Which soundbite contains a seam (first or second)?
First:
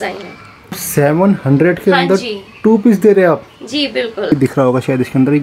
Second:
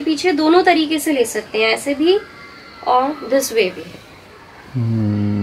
first